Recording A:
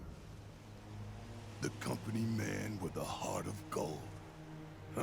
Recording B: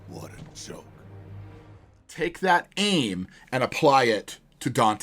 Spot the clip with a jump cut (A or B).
B